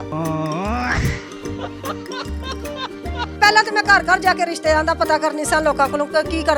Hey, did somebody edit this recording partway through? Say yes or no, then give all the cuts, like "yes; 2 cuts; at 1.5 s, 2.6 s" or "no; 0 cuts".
yes; 1 cut; at 3.3 s